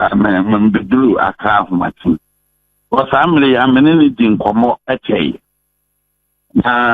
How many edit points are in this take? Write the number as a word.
one